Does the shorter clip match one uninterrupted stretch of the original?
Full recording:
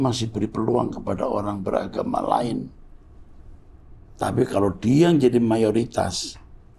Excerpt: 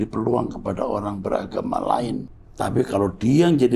no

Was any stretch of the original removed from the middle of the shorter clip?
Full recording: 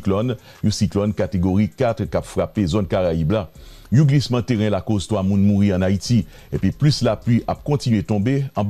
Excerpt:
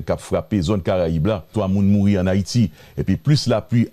yes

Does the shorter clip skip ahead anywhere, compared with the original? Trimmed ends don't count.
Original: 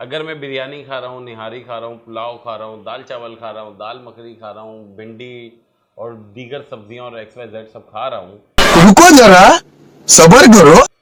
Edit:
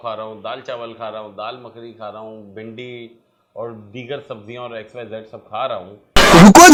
no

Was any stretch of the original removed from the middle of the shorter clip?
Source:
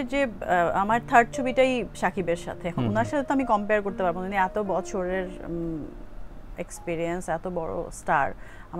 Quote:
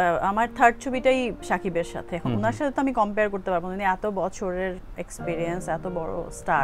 yes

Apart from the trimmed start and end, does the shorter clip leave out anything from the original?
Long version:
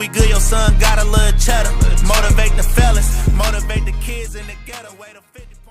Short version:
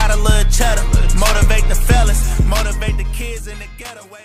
no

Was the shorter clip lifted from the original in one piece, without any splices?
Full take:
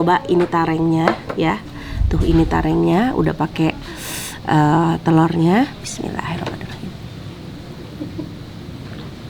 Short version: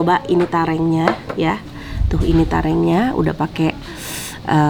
yes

